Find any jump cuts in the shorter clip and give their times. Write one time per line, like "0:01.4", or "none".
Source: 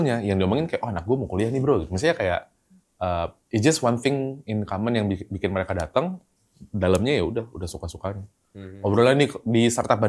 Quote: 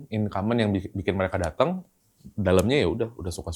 none

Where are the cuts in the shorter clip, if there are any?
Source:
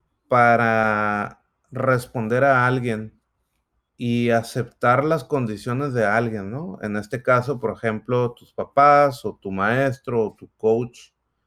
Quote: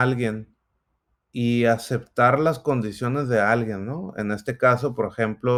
none

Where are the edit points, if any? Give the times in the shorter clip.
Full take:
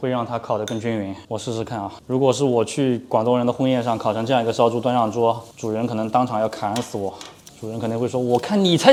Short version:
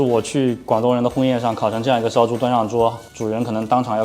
none

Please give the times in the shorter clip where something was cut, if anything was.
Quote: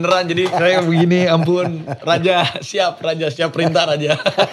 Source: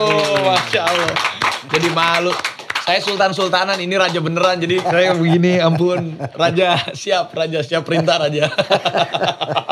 none

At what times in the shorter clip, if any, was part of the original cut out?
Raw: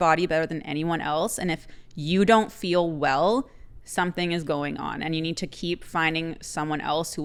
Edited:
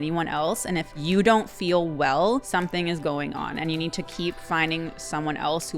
0:00.9
0:02.5

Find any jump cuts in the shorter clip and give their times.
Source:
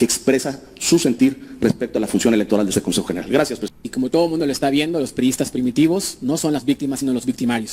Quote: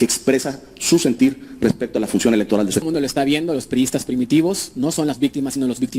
0:02.8

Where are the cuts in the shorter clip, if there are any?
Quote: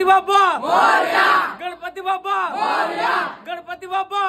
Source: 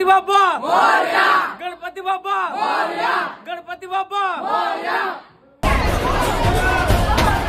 none

